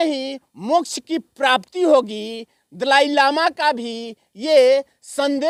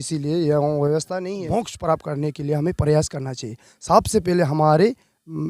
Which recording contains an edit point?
second; 1 cut; at 1.2 s

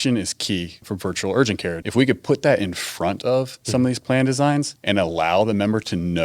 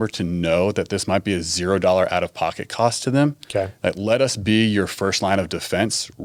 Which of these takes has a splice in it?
first; 4 cuts; at 0.8 s, 1.8 s, 3.6 s, 4.8 s

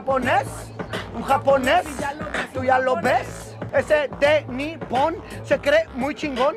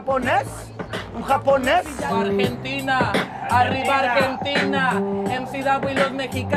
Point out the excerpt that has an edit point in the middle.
second; 1 cut; at 2.1 s

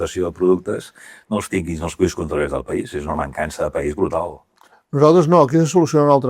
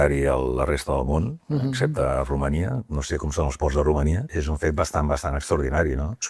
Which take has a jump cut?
second; 1 cut; at 4.3 s

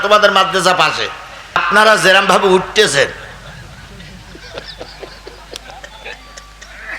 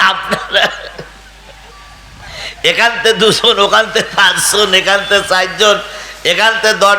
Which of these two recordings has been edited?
first; 1 cut; at 1.6 s

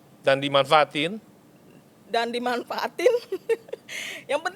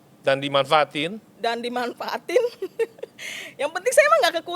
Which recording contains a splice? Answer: second; 1 cut; at 1.2 s

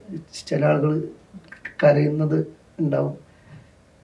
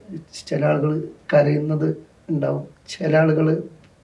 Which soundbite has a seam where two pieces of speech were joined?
second; 2 cuts; at 1.1 s, 2.8 s

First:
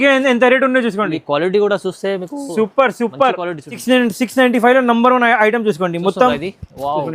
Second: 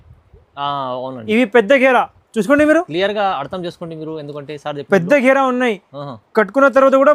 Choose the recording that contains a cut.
first; 1 cut; at 3.8 s

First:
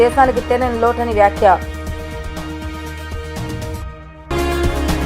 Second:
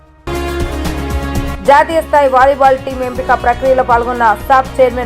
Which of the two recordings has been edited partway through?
second; 1 cut; at 0.9 s

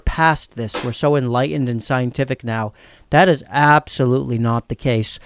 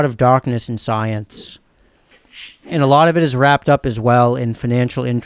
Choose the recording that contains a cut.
second; 1 cut; at 2.2 s

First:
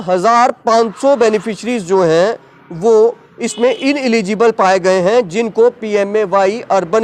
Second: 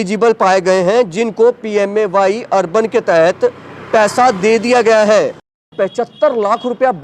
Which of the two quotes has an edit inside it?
second; 1 cut; at 5.7 s

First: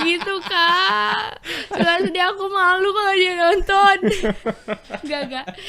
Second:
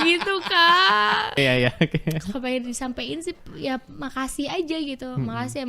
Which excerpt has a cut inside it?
second; 1 cut; at 1.4 s

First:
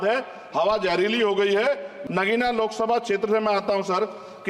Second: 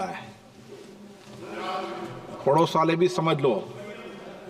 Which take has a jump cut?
first; 1 cut; at 1.9 s

